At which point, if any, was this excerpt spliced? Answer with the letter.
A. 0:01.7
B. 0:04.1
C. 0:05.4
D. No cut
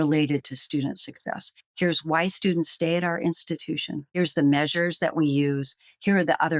B